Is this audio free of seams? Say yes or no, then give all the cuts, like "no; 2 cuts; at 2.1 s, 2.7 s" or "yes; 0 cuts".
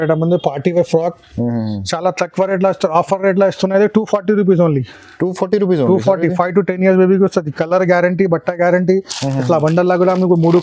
yes; 0 cuts